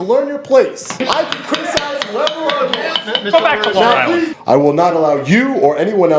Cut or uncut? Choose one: cut